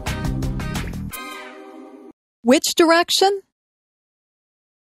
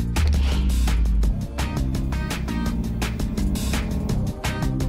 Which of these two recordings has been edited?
first; 1 cut; at 2.2 s

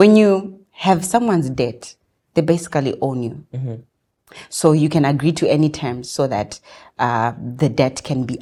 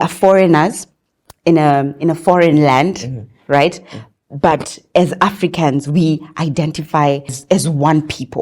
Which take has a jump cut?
second; 1 cut; at 7.4 s

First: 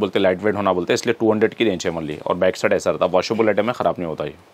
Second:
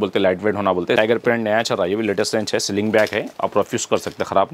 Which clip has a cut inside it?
second; 1 cut; at 1.0 s

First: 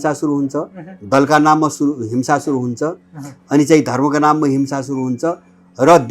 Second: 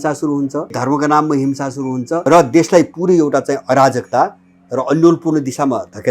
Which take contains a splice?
second; 2 cuts; at 0.8 s, 2.2 s

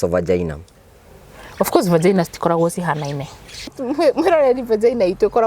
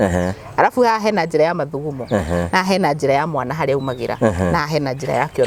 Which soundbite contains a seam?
first; 1 cut; at 3.8 s

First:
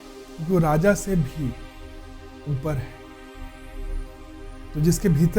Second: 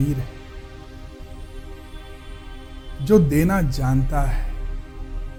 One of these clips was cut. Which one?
first; 1 cut; at 3.5 s

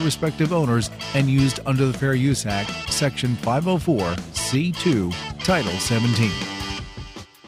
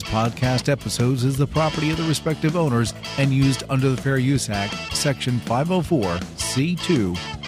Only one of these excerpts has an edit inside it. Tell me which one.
first; 1 cut; at 6.5 s

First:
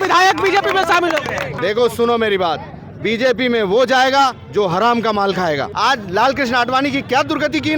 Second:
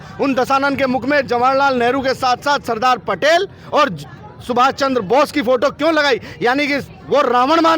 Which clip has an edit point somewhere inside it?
first; 2 cuts; at 1.5 s, 5.7 s

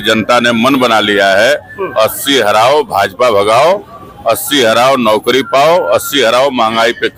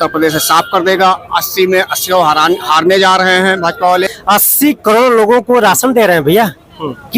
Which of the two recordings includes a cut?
second; 1 cut; at 4.1 s

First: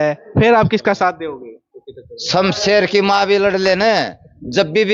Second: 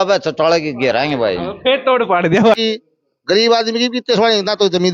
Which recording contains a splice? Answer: second; 1 cut; at 2.6 s

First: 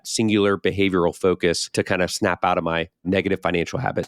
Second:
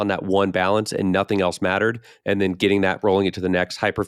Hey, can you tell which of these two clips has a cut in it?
first; 2 cuts; at 1.6 s, 2.9 s

